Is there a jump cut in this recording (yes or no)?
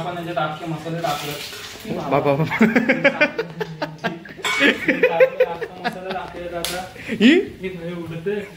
no